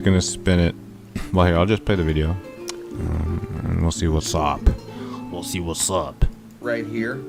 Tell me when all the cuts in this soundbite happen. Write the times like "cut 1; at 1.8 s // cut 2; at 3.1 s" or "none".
none